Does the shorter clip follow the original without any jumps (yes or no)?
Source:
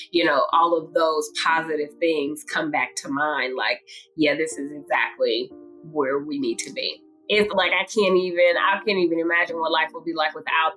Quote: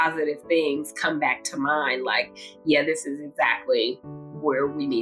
yes